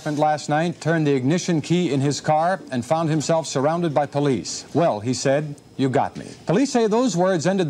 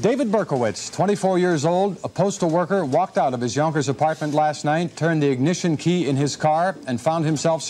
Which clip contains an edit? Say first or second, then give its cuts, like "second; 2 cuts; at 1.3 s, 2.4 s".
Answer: first; 2 cuts; at 4.6 s, 6.3 s